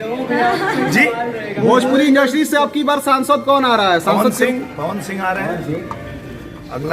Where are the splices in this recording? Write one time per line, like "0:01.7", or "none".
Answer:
none